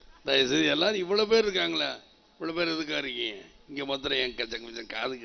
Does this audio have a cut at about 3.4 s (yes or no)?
no